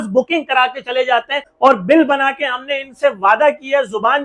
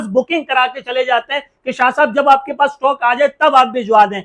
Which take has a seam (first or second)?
first